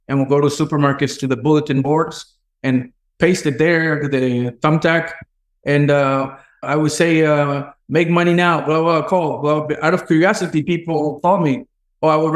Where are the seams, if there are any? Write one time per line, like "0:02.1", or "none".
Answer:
0:03.0
0:06.6